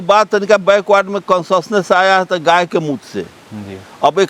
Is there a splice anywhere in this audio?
no; 0 cuts

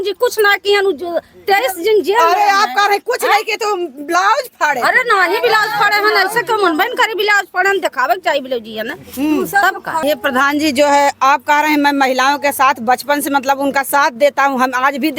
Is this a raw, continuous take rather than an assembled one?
no; 1 cut; at 10.0 s

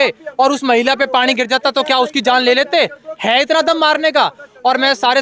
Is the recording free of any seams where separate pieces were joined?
yes; 0 cuts

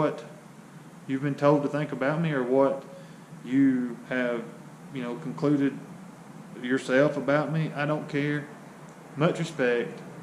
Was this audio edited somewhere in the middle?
no; 0 cuts

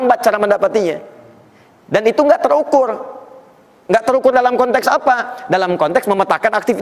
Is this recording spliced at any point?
no; 0 cuts

